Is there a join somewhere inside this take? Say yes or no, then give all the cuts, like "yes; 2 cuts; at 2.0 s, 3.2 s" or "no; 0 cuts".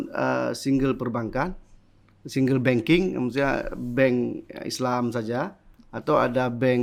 no; 0 cuts